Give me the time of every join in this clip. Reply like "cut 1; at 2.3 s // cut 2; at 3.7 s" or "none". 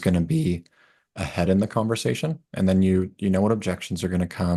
none